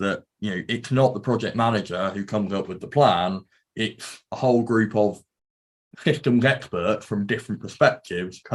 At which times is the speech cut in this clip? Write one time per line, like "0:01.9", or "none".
none